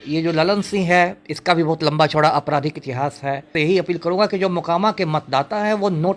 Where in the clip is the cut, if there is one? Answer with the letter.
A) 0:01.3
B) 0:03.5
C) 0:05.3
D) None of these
B